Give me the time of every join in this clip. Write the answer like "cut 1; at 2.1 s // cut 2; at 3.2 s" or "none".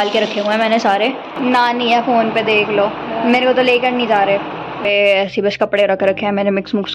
cut 1; at 1.3 s // cut 2; at 4.8 s